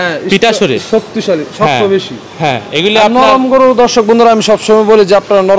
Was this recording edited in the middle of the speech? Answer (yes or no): no